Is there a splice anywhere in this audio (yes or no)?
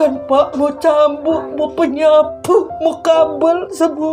no